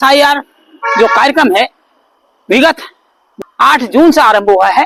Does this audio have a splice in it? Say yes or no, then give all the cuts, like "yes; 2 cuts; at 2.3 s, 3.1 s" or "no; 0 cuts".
no; 0 cuts